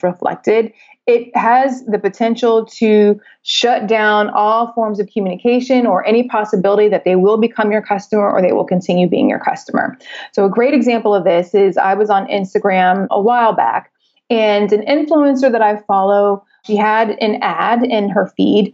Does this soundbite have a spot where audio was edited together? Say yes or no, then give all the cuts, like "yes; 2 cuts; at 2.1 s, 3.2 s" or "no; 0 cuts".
yes; 2 cuts; at 13.1 s, 16.6 s